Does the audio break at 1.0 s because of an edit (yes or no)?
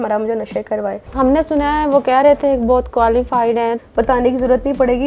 yes